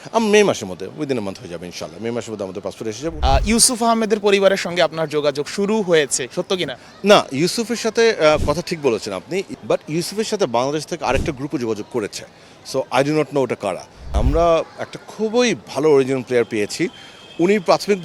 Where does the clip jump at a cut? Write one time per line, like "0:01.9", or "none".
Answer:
0:03.1
0:09.5
0:14.0